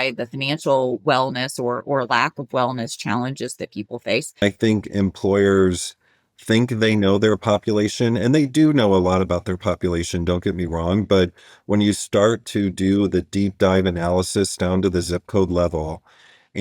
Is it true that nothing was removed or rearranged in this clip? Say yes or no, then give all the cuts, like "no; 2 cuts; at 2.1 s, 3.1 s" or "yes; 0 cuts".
no; 1 cut; at 4.4 s